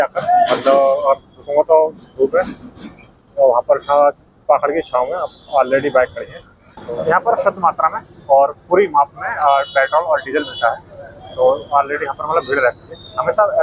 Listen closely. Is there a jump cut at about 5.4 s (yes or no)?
no